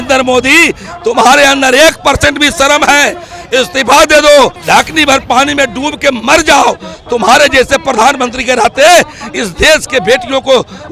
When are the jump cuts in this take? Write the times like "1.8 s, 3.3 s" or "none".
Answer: 4.6 s